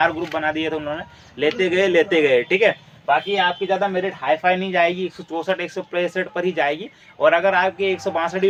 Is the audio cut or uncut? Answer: uncut